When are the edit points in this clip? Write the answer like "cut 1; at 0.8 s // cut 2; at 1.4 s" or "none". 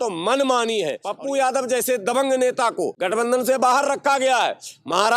cut 1; at 1.0 s // cut 2; at 3.0 s